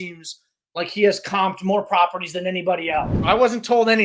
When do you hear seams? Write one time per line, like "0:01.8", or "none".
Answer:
0:03.1